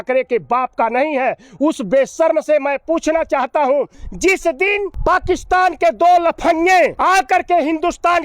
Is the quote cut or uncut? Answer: cut